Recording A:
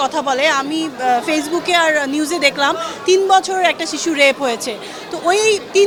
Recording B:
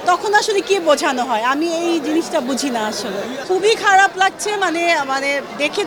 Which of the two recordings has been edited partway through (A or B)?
B